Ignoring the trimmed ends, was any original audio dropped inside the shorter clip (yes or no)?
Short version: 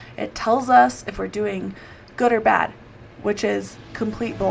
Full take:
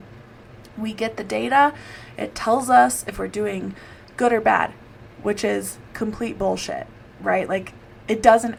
no